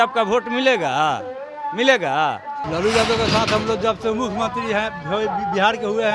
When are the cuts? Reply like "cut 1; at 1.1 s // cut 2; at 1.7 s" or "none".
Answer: cut 1; at 2.6 s